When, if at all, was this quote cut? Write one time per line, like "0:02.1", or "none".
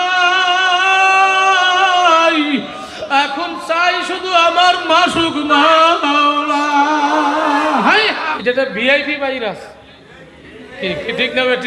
0:08.3